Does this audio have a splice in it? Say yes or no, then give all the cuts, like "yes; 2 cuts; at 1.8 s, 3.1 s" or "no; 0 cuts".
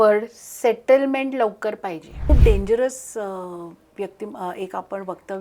yes; 1 cut; at 2.3 s